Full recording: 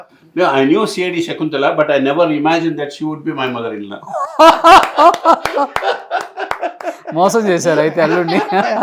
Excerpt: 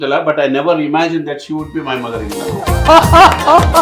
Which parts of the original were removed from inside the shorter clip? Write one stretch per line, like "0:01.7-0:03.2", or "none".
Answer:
none